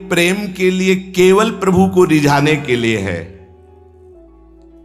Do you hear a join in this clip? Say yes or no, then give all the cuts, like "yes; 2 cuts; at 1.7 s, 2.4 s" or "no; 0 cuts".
no; 0 cuts